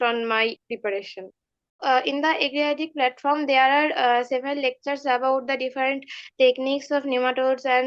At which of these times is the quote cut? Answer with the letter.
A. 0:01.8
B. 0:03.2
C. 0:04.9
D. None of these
A